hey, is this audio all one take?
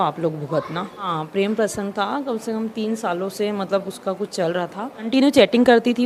no; 2 cuts; at 1.1 s, 5.1 s

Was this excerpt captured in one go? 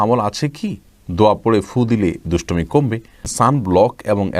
no; 1 cut; at 3.2 s

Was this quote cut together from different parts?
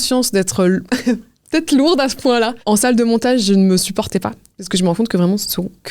no; 0 cuts

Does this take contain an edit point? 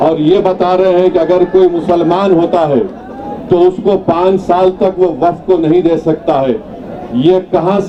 no; 0 cuts

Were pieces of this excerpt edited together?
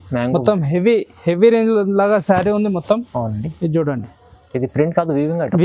no; 0 cuts

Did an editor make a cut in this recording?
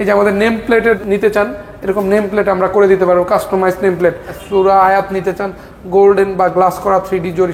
yes; 2 cuts; at 1.0 s, 4.4 s

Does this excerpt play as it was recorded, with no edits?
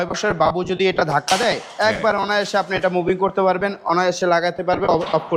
yes; 0 cuts

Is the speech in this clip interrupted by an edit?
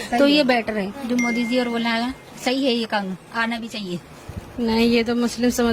yes; 2 cuts; at 0.9 s, 4.1 s

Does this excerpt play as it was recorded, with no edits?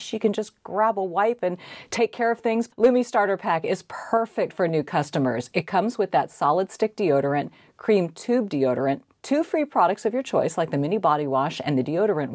no; 1 cut; at 2.7 s

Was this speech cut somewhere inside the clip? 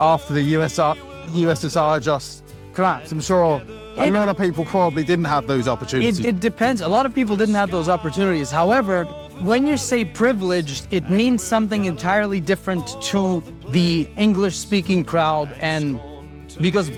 no; 0 cuts

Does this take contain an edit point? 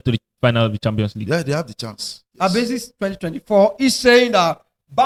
no; 0 cuts

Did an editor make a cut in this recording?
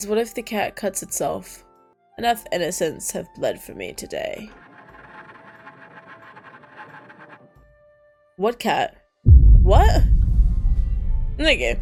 no; 0 cuts

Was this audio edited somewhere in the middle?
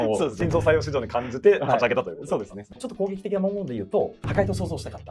yes; 1 cut; at 2.8 s

